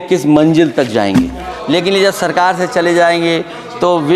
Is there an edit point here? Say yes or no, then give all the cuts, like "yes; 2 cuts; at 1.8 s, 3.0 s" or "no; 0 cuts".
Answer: yes; 1 cut; at 1.5 s